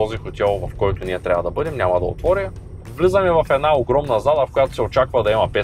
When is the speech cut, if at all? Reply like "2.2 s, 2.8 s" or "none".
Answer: 2.8 s